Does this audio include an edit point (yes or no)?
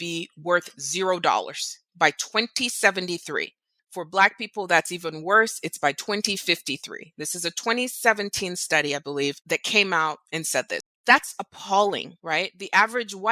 yes